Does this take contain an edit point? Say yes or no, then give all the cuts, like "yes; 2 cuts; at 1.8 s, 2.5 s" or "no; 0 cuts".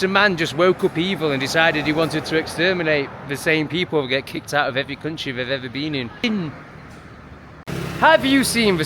yes; 2 cuts; at 6.2 s, 7.6 s